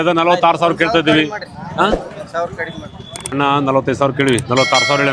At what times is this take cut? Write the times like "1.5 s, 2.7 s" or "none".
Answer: 3.3 s